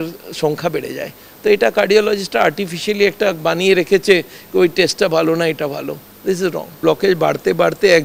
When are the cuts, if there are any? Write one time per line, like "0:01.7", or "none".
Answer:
0:06.8